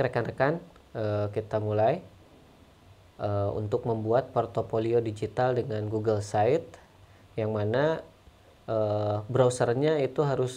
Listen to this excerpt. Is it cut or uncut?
uncut